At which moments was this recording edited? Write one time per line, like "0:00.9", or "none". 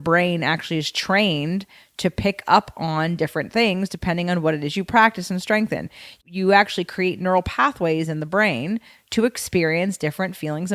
0:06.2